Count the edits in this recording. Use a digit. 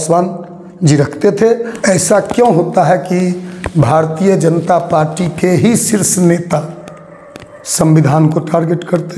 1